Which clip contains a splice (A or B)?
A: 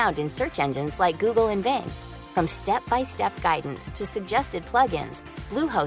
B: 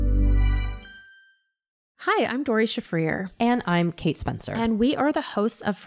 B